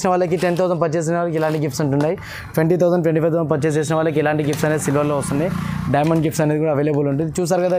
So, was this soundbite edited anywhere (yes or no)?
no